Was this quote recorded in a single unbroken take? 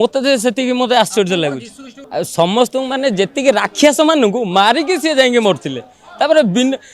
no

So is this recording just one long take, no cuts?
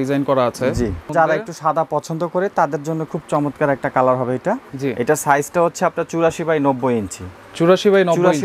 no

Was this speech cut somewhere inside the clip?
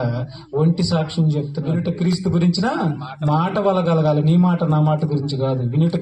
yes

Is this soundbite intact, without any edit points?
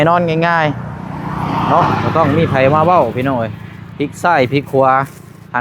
yes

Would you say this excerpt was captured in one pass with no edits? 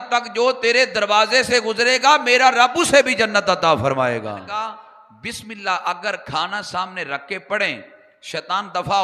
no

